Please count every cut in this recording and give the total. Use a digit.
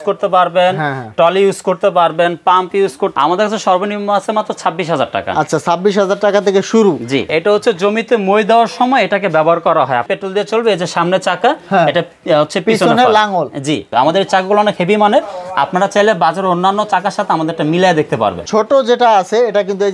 5